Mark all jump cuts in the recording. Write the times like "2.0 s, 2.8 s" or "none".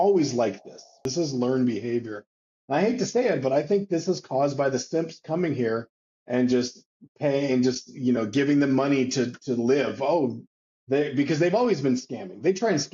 1.0 s